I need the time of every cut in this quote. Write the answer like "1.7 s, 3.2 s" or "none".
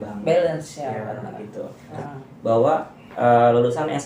1.9 s